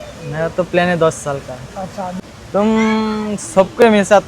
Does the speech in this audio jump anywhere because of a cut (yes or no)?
yes